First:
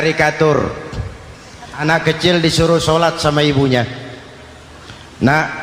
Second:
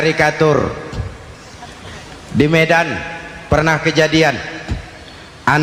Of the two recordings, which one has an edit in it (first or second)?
first